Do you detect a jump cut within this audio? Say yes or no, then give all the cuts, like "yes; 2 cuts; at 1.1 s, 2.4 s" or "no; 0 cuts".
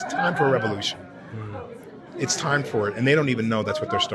yes; 1 cut; at 1.2 s